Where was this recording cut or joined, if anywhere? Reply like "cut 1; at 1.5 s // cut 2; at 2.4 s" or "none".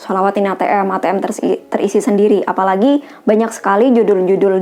none